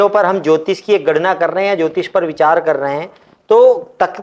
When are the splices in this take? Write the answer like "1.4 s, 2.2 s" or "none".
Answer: none

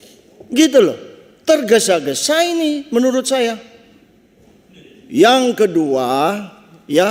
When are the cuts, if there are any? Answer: none

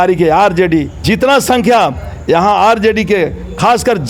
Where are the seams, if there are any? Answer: 0.9 s

